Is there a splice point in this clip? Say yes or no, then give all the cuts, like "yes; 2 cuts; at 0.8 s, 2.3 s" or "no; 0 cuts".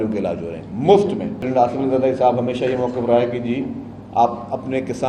yes; 1 cut; at 1.5 s